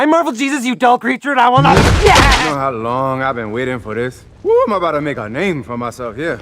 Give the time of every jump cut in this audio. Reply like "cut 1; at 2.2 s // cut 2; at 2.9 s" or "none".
cut 1; at 2.5 s // cut 2; at 4.2 s